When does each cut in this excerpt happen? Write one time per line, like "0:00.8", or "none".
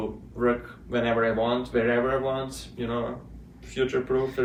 none